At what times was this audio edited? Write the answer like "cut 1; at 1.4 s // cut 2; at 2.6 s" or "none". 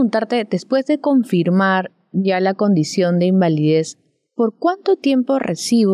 none